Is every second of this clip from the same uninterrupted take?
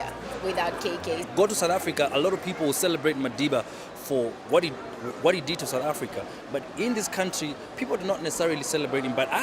yes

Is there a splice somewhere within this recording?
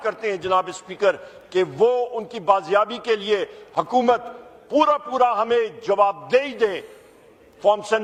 no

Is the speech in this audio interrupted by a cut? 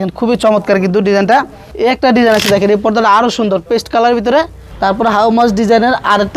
yes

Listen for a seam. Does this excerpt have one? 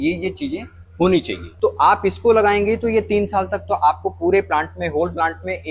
yes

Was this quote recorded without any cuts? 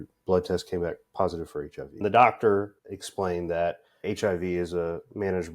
no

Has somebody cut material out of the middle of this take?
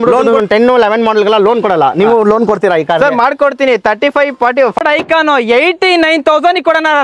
yes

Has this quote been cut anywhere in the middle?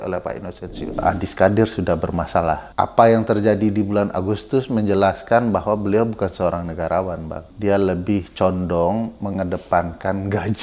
yes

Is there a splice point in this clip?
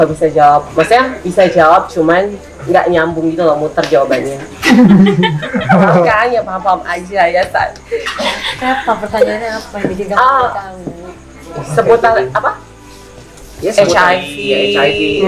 no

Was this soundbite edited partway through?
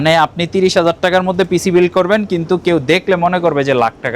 no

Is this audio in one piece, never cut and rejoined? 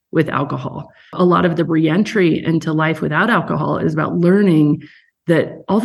no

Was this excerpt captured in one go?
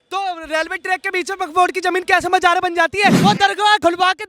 no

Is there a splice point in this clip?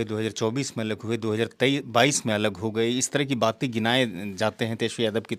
no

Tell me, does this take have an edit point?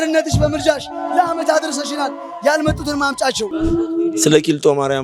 yes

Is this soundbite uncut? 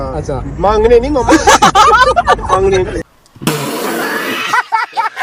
yes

